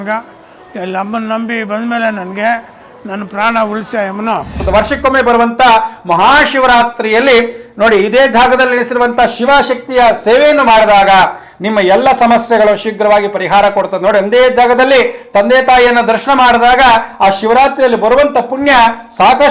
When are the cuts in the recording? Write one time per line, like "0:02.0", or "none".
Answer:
0:04.6